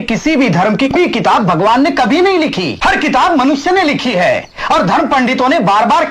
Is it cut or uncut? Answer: cut